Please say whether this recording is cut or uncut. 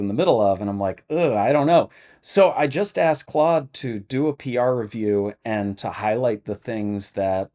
uncut